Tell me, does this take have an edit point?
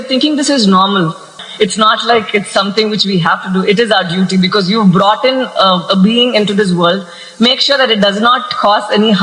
yes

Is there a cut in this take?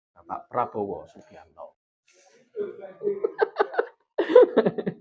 no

